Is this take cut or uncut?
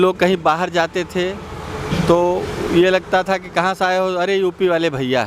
uncut